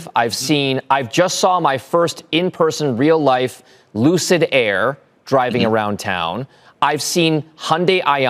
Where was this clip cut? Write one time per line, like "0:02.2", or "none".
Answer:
none